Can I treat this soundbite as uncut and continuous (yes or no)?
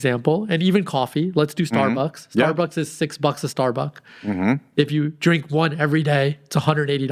yes